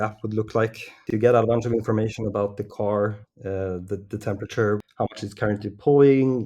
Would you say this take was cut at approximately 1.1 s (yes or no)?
yes